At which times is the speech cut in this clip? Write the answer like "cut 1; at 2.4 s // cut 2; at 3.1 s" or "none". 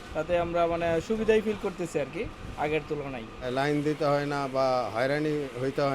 cut 1; at 3.3 s

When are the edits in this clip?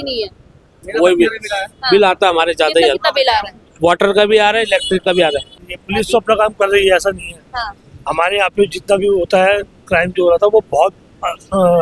cut 1; at 5.6 s

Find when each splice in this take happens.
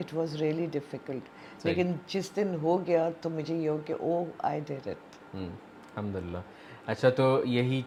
none

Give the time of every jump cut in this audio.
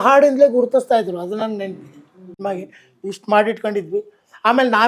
cut 1; at 2.4 s

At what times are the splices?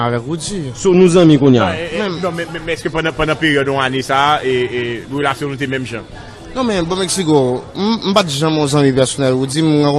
cut 1; at 4.1 s

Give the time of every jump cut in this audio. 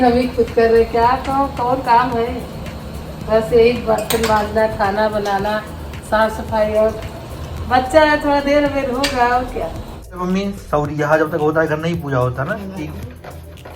cut 1; at 10.2 s

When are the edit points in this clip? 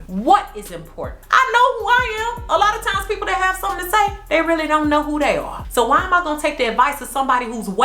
cut 1; at 1.2 s

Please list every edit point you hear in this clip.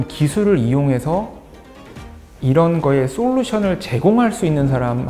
none

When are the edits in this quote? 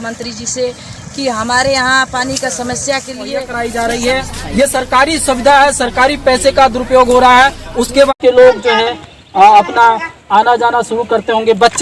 cut 1; at 3.5 s // cut 2; at 8.2 s

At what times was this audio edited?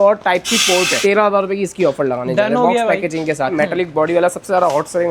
cut 1; at 1.0 s // cut 2; at 3.5 s

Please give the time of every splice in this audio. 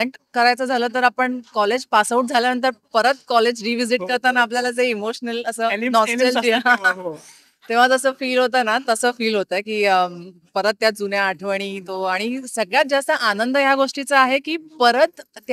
none

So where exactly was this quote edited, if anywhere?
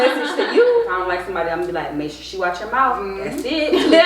cut 1; at 0.9 s

